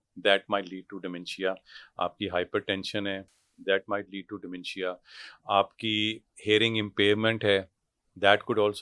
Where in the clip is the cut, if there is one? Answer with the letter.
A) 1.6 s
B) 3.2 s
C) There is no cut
C